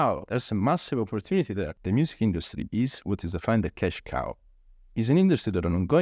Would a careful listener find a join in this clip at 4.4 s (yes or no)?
no